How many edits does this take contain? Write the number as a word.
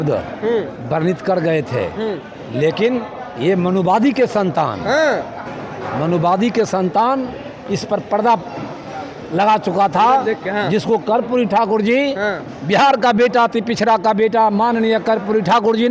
zero